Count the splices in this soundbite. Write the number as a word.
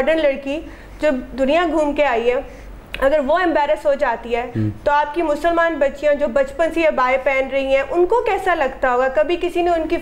zero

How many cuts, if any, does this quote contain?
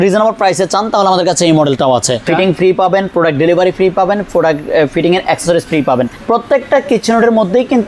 two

